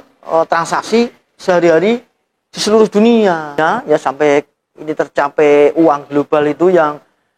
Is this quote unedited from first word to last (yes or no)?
no